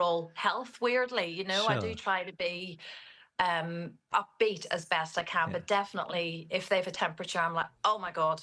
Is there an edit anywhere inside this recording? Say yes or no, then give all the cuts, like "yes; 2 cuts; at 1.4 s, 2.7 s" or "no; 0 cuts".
no; 0 cuts